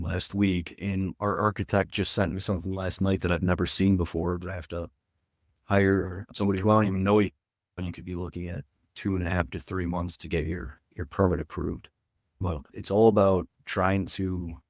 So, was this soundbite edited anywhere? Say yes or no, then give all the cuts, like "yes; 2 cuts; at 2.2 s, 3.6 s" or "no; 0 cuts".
yes; 2 cuts; at 7.8 s, 12.4 s